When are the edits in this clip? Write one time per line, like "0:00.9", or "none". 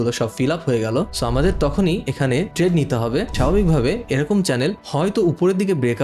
0:03.3